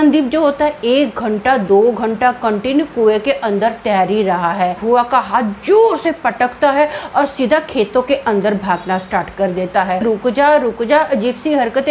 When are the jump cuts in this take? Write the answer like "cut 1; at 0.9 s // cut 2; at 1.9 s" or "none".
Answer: cut 1; at 4.8 s // cut 2; at 10.0 s